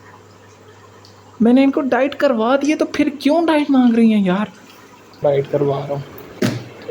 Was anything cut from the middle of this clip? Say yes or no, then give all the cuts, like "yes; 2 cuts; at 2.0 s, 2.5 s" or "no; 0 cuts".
yes; 1 cut; at 5.2 s